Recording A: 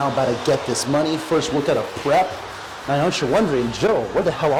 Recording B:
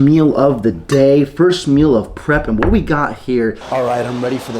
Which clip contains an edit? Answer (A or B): B